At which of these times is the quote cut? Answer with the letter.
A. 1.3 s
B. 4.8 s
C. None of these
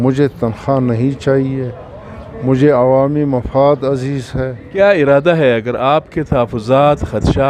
B